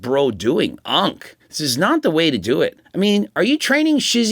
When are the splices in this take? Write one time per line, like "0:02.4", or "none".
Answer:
0:02.8